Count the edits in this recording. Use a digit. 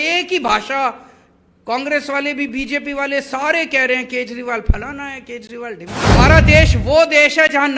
1